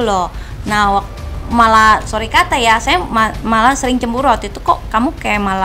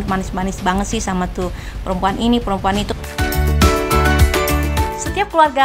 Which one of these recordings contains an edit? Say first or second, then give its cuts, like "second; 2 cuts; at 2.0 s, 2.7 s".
second; 1 cut; at 2.9 s